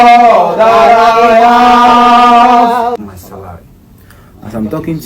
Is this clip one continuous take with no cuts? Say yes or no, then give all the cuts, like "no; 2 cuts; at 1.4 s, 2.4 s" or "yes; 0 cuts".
no; 1 cut; at 3.1 s